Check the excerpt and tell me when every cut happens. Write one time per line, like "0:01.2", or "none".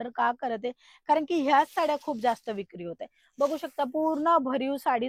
none